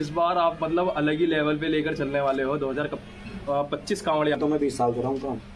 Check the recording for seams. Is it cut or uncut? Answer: cut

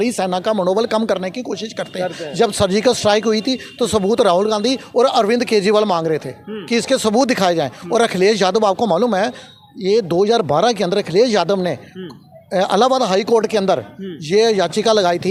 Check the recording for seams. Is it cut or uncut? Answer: uncut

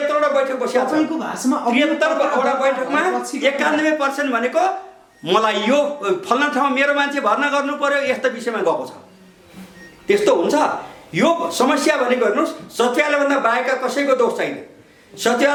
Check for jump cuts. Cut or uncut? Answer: uncut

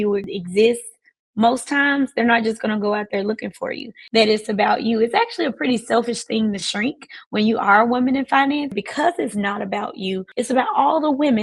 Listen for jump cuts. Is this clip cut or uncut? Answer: cut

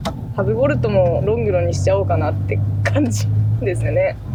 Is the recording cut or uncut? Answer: uncut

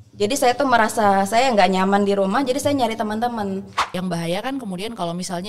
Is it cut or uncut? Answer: cut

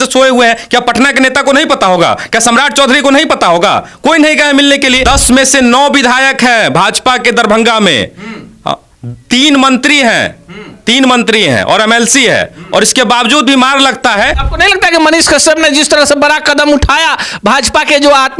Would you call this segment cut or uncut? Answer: cut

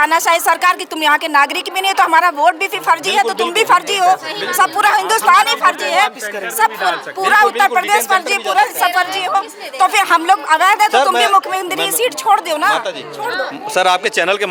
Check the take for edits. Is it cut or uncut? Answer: uncut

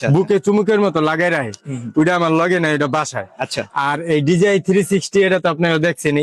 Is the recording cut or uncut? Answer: uncut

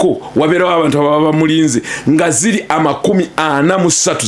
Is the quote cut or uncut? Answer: uncut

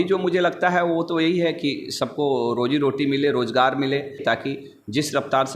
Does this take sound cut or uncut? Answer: cut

